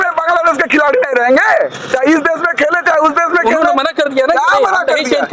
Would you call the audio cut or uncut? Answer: uncut